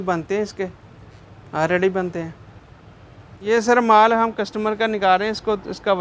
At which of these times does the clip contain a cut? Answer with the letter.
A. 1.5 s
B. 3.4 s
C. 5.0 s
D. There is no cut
B